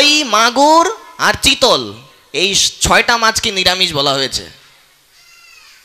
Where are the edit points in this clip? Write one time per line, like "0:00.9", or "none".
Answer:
none